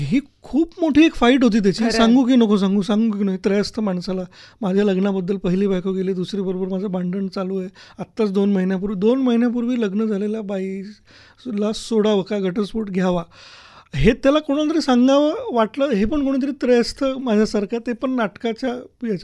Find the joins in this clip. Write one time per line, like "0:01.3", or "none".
none